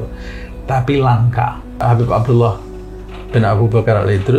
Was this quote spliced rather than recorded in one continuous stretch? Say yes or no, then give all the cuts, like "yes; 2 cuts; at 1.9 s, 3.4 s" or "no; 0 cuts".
yes; 1 cut; at 1.8 s